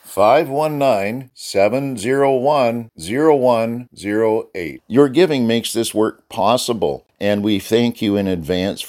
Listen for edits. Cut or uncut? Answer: cut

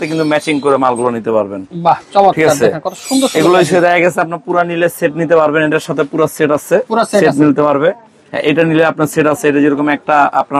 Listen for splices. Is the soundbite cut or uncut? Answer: uncut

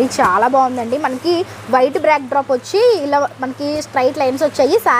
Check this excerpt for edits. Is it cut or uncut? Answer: uncut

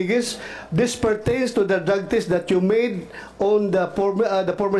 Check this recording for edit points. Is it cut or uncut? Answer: uncut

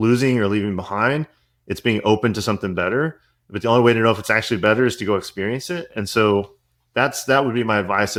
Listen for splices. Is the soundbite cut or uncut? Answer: uncut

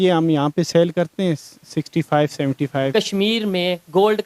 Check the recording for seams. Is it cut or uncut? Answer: cut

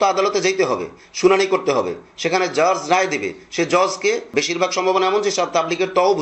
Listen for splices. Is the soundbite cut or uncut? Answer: cut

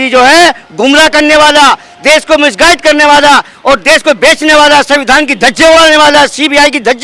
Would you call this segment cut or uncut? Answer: uncut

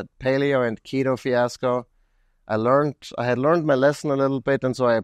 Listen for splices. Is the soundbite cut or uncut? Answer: uncut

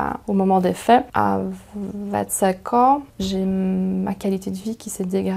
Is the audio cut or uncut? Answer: cut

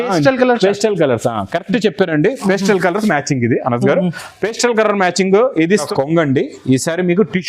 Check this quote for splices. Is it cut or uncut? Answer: cut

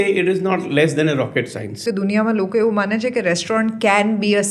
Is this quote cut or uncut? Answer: cut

